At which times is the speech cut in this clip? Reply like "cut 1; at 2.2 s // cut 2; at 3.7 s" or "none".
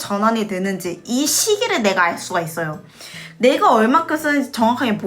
cut 1; at 3.3 s